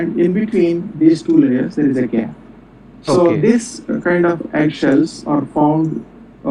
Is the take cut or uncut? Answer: uncut